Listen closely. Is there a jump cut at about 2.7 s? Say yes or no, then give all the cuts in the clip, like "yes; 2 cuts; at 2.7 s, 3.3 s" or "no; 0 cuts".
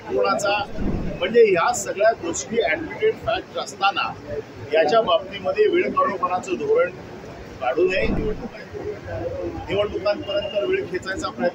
no; 2 cuts; at 1.0 s, 8.2 s